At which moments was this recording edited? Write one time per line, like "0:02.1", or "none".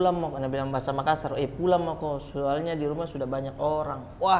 none

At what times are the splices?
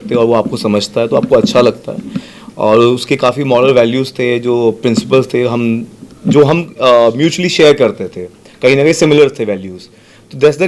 none

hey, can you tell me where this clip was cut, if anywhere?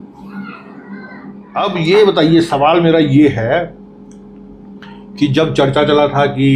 0:01.4

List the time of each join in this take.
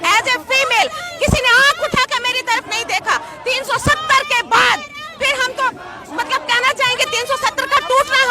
none

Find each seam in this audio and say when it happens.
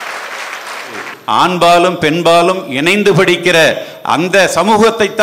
0:01.1

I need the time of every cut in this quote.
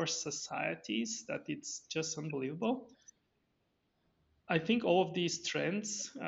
none

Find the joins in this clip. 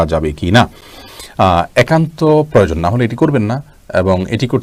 none

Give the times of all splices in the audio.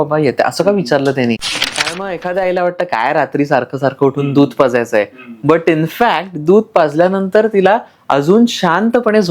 0:01.6

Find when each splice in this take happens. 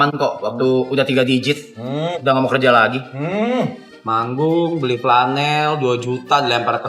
0:03.9

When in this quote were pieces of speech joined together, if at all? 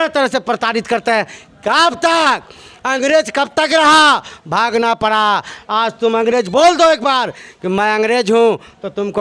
none

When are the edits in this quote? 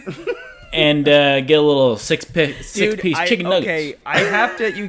0:03.7

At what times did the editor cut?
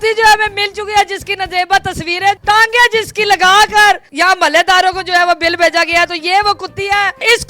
0:02.4

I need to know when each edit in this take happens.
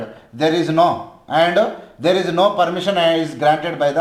none

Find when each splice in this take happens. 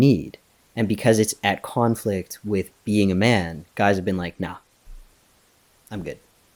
none

